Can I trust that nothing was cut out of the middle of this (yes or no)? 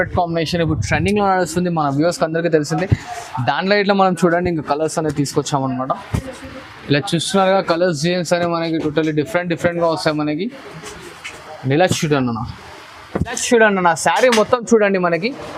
no